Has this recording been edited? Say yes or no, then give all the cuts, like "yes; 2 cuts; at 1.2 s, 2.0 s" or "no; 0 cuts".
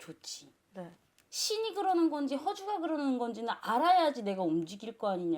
yes; 1 cut; at 1.3 s